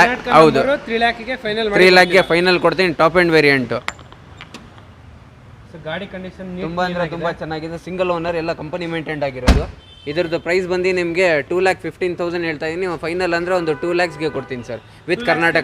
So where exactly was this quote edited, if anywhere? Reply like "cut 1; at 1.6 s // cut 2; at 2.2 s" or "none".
cut 1; at 4.0 s